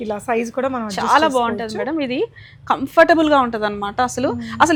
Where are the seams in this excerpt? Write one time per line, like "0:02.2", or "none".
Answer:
none